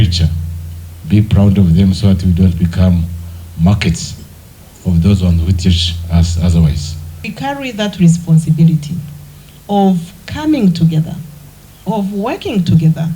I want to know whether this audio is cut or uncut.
cut